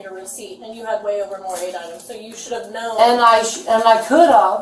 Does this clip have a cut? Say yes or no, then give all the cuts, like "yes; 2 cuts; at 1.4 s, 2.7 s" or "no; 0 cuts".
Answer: yes; 1 cut; at 2.0 s